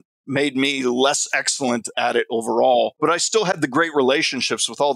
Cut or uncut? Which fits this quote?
cut